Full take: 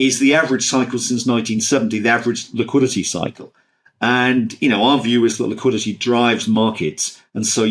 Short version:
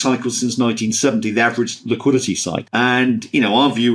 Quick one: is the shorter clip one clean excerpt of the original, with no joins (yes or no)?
no